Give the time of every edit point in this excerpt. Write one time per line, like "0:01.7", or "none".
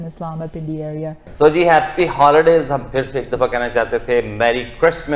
0:01.2